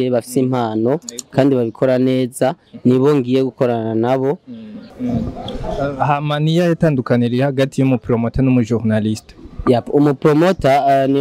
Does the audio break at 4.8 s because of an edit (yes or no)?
yes